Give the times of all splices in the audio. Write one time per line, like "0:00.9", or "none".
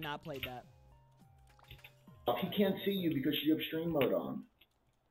0:02.3